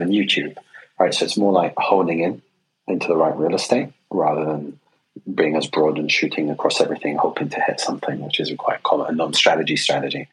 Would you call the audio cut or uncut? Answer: cut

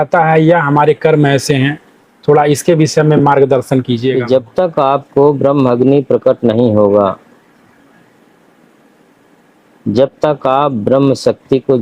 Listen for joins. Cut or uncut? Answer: cut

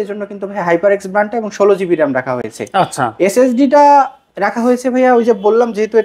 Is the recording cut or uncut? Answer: uncut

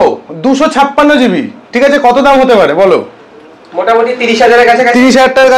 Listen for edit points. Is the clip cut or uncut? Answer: uncut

